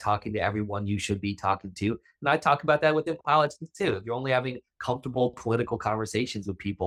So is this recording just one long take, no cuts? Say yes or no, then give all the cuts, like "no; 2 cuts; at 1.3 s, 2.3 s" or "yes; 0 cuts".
yes; 0 cuts